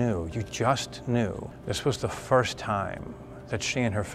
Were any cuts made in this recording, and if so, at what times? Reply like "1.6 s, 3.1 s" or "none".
1.5 s

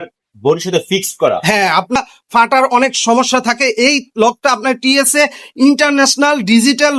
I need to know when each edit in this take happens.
1.9 s

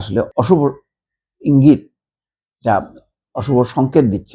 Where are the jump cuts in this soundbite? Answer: none

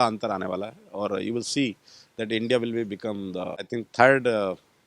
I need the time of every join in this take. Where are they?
3.7 s

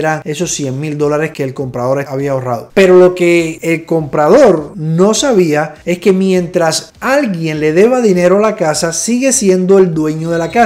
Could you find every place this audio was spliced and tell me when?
none

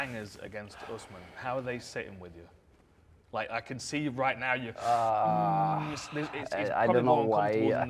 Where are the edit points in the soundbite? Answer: none

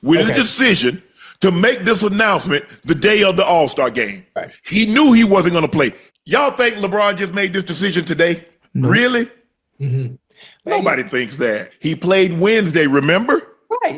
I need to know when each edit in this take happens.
6.0 s, 11.7 s

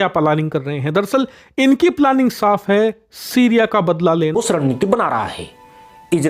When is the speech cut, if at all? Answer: 4.3 s

